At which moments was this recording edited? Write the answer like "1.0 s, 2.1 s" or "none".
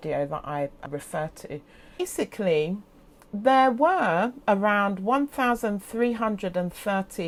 none